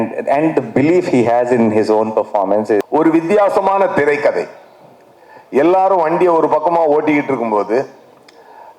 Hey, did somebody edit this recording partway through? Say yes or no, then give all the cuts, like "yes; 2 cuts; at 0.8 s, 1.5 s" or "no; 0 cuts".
yes; 1 cut; at 2.9 s